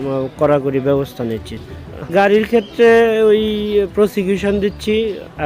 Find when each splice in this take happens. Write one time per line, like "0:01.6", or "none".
0:02.0

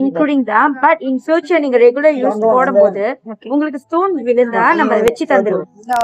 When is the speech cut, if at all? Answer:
none

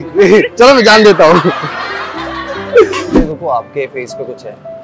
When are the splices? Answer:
0:03.0

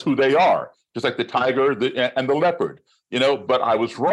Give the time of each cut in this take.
none

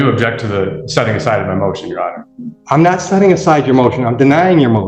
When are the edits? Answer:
none

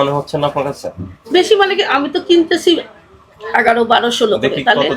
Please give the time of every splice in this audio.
none

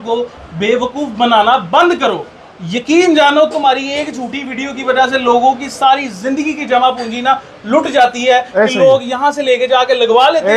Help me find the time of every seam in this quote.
none

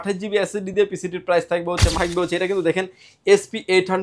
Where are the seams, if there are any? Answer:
0:01.9

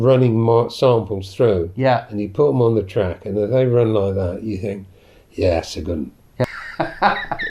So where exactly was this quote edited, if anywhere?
0:06.4

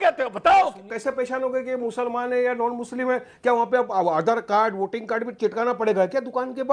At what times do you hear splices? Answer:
0:00.9

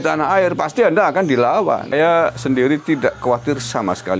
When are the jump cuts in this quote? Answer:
0:01.9

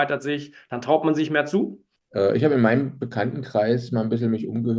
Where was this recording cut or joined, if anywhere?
0:01.9

